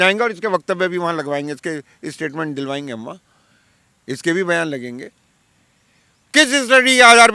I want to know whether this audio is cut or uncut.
uncut